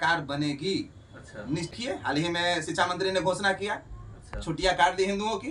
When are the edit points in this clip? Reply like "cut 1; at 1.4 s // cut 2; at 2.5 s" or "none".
cut 1; at 1.8 s